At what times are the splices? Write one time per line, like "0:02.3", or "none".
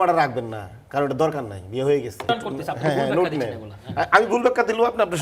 0:02.3